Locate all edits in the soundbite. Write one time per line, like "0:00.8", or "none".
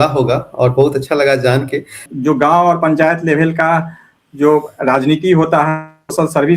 0:02.1